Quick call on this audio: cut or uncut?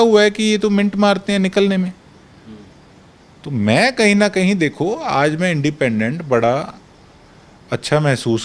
uncut